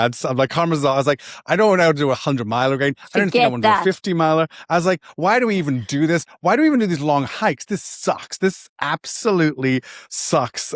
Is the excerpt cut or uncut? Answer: uncut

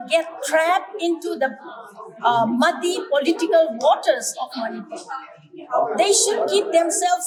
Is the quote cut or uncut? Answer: uncut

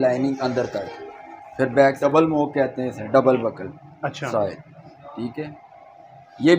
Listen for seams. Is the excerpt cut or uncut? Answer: cut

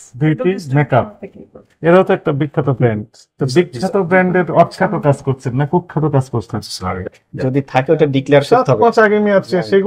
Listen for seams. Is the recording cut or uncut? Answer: cut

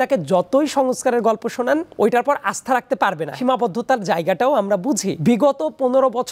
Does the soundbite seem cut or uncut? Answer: cut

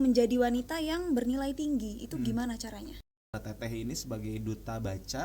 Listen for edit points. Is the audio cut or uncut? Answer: cut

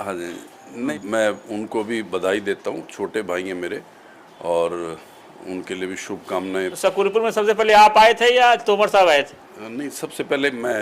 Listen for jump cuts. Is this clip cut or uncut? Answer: cut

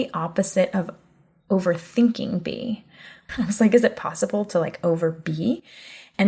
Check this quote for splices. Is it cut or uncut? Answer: cut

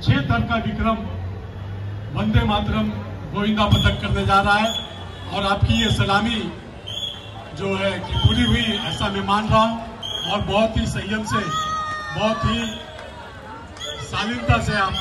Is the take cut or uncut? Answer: uncut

